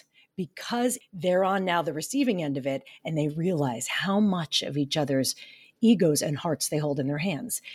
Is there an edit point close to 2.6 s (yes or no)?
no